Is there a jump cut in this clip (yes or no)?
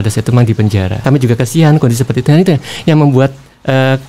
yes